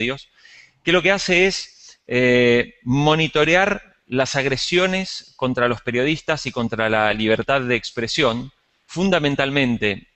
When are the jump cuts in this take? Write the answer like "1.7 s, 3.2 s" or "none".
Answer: 8.9 s